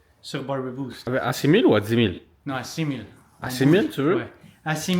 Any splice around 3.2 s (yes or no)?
no